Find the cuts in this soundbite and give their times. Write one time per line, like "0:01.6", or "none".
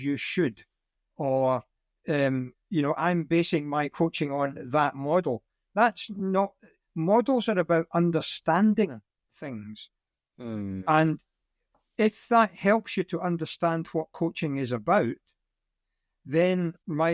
none